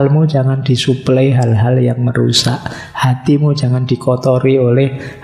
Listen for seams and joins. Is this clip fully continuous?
yes; 0 cuts

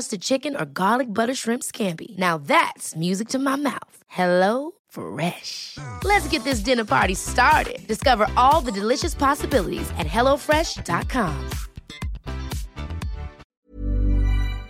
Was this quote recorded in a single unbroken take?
no; 1 cut; at 13.6 s

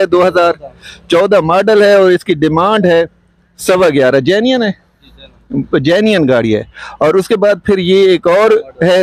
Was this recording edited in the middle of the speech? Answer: no; 0 cuts

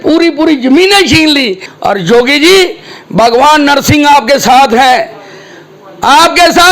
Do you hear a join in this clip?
yes; 1 cut; at 1.6 s

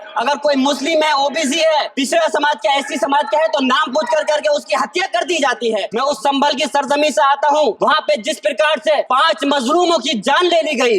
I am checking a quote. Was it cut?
yes; 4 cuts; at 2.0 s, 5.9 s, 7.8 s, 9.1 s

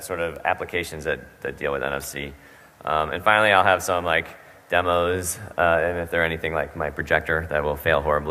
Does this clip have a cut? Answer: yes; 1 cut; at 3.6 s

